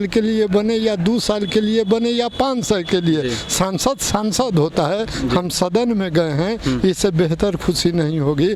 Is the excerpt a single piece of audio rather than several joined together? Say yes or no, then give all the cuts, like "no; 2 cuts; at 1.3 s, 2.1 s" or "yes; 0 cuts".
yes; 0 cuts